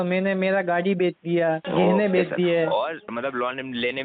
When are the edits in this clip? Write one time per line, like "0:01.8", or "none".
0:01.6
0:03.1